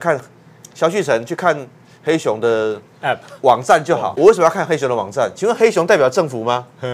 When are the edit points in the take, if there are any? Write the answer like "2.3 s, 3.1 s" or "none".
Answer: 4.1 s